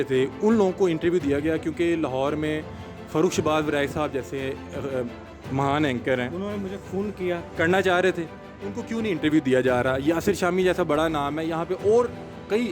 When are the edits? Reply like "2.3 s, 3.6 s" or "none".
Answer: none